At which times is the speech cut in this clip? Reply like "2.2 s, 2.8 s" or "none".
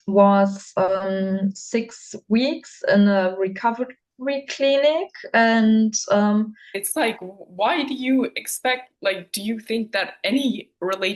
6.7 s